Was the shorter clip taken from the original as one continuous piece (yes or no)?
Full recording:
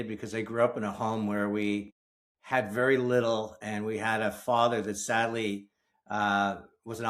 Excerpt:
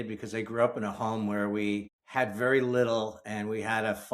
no